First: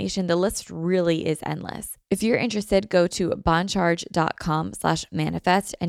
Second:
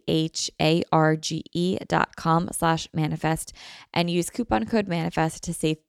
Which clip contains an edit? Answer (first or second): first